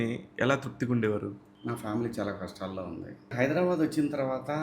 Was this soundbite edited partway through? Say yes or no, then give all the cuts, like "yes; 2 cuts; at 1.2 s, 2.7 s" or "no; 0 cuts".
yes; 2 cuts; at 1.5 s, 3.3 s